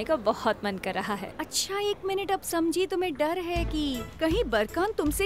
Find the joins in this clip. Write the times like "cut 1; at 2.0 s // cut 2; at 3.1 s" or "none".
cut 1; at 1.3 s